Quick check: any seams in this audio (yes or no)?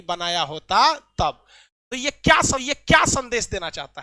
no